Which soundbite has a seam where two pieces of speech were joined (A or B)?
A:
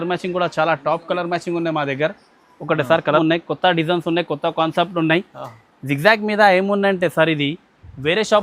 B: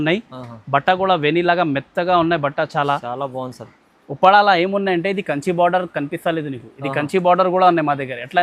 A